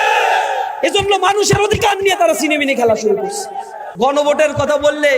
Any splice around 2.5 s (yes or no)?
no